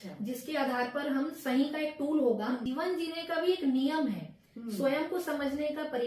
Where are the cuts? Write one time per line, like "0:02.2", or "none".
0:02.6